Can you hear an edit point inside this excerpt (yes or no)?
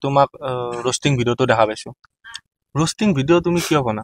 no